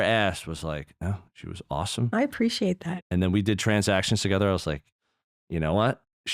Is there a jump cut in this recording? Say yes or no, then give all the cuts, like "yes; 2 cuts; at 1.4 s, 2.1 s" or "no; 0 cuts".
yes; 1 cut; at 2.8 s